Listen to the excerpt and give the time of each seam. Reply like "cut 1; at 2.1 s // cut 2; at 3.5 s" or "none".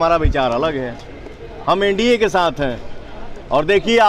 none